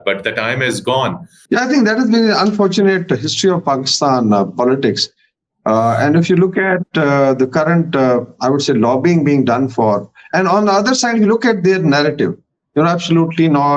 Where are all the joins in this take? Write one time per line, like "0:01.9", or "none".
0:01.3